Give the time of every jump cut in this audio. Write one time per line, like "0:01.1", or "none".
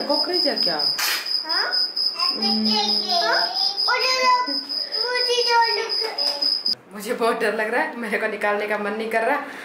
0:06.8